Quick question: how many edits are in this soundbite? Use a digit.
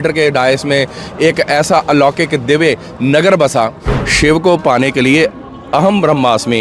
1